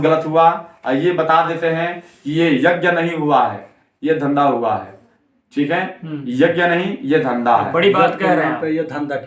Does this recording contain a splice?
no; 0 cuts

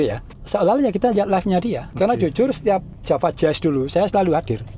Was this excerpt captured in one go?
no; 2 cuts; at 1.8 s, 2.9 s

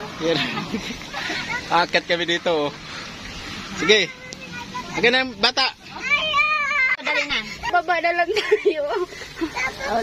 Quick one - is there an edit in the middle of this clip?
no; 0 cuts

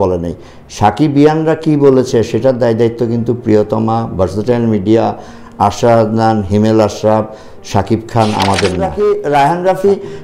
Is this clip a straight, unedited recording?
no; 1 cut; at 8.8 s

